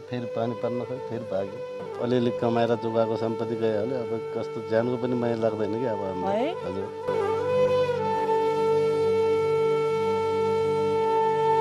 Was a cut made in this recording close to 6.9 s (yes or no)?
no